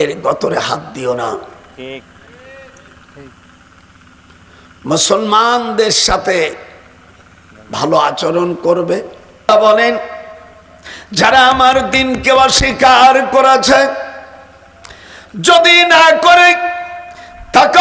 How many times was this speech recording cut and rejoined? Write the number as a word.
one